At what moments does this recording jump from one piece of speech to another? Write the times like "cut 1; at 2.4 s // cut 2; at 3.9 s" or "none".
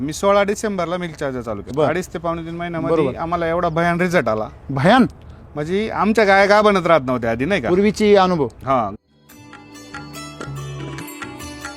cut 1; at 1.7 s // cut 2; at 8.9 s